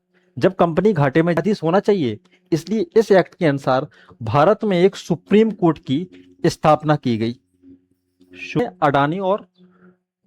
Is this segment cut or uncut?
cut